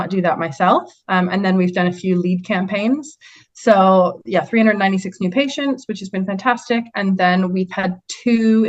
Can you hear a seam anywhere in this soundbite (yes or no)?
no